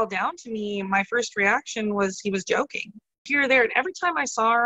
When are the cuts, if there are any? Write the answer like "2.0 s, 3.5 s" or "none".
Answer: 3.3 s